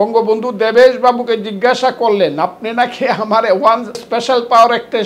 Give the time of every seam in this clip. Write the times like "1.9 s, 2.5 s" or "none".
4.0 s